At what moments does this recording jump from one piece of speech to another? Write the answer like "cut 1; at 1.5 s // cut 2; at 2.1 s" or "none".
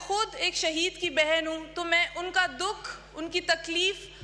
none